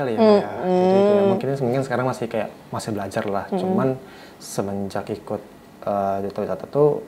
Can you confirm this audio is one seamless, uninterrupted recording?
yes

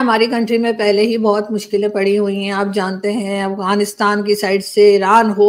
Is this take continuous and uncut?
yes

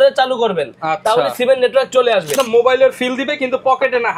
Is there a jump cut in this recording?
yes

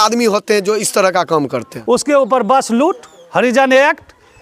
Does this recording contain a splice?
yes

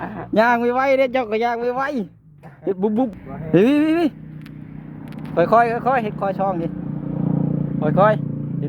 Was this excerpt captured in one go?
no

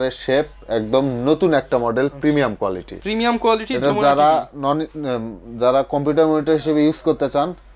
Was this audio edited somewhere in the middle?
no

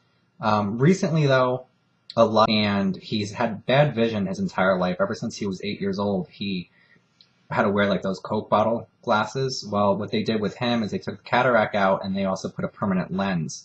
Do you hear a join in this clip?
no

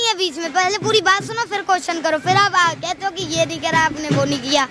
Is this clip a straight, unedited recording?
yes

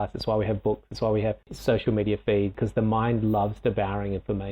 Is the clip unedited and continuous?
no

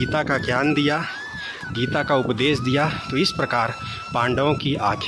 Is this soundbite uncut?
yes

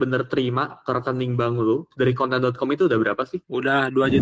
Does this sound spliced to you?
no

